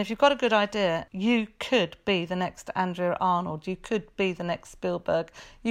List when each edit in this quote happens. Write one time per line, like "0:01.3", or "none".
0:01.0